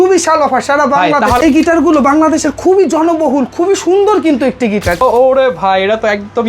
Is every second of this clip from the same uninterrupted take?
no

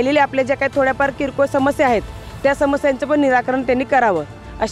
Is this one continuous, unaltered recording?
yes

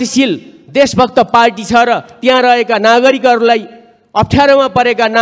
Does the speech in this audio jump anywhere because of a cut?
no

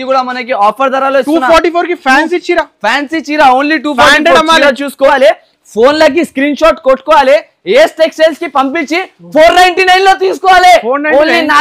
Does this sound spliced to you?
yes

